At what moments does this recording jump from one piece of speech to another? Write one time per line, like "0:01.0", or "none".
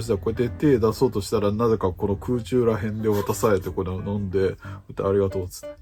none